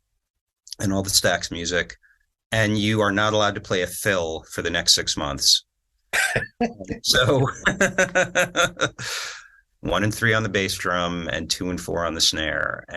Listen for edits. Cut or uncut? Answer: cut